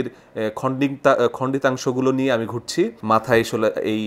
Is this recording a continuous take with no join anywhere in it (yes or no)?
no